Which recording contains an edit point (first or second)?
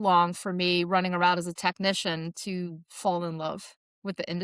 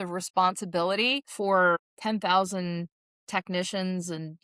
second